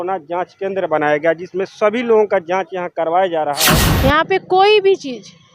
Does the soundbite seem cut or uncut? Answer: cut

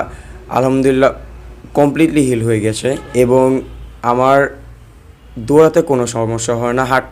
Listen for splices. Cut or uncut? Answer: cut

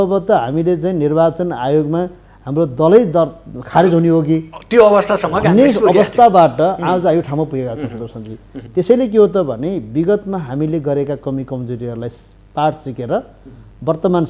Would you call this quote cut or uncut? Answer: uncut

